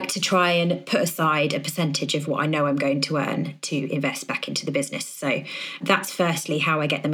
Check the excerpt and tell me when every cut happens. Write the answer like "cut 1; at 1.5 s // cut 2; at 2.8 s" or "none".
none